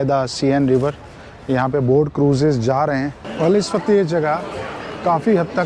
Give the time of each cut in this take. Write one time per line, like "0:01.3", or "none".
0:03.2